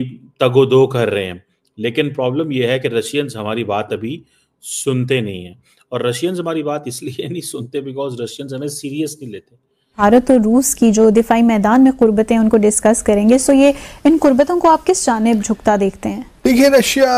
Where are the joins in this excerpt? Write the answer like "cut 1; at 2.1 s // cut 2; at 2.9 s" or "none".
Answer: none